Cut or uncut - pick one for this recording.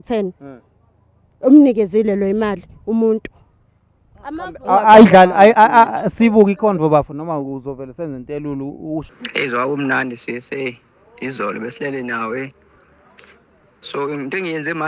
cut